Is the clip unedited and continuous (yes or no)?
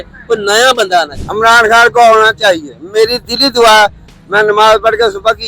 no